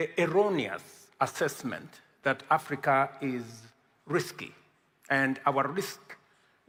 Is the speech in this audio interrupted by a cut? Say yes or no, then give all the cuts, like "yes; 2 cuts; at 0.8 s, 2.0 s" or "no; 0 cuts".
no; 0 cuts